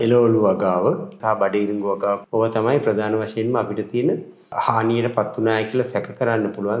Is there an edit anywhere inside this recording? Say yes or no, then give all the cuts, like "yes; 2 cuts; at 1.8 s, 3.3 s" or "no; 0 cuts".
yes; 3 cuts; at 1.1 s, 2.2 s, 4.5 s